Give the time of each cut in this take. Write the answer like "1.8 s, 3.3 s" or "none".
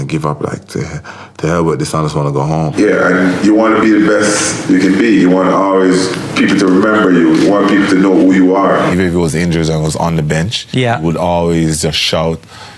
2.7 s, 8.9 s